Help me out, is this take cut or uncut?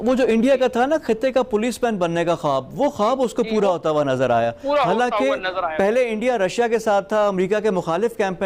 uncut